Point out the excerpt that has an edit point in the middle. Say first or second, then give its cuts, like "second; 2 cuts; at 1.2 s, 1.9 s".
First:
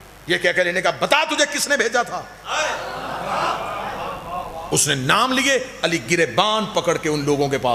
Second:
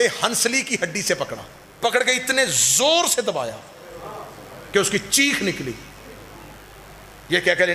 second; 1 cut; at 1.9 s